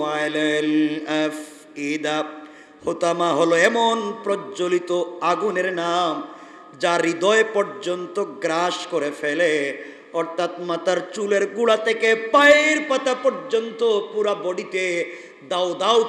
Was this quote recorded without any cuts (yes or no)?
yes